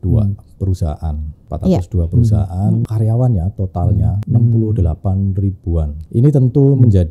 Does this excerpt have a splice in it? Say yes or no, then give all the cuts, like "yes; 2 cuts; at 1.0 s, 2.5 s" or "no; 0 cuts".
yes; 4 cuts; at 1.5 s, 2.8 s, 4.2 s, 6.0 s